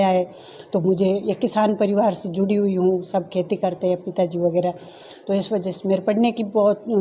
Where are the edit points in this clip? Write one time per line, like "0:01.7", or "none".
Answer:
none